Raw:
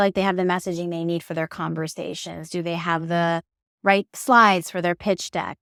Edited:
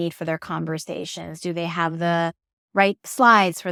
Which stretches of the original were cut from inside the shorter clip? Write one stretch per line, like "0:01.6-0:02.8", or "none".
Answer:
none